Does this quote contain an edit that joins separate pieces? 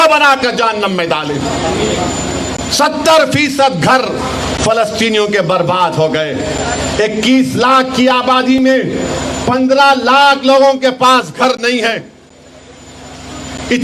no; 0 cuts

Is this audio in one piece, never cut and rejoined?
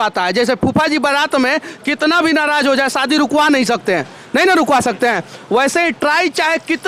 yes; 0 cuts

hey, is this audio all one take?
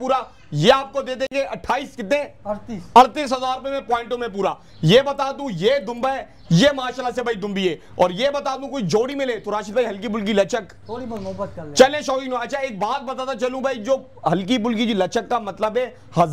yes; 0 cuts

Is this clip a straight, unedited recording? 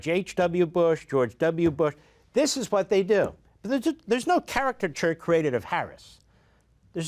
yes; 0 cuts

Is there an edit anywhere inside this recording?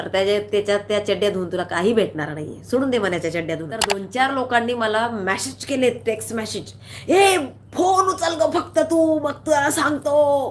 yes; 1 cut; at 4.1 s

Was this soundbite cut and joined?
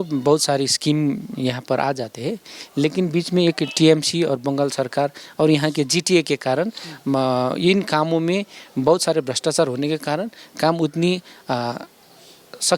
no; 0 cuts

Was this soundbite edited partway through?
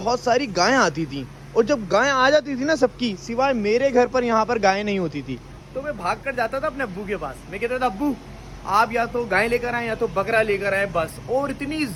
no; 0 cuts

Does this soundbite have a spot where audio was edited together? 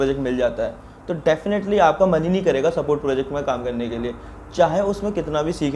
no; 0 cuts

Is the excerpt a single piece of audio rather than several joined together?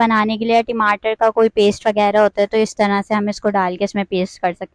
yes; 0 cuts

